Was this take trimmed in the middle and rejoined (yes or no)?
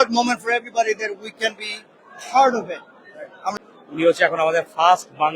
yes